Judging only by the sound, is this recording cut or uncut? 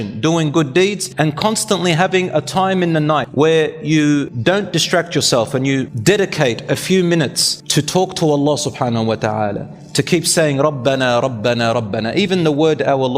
cut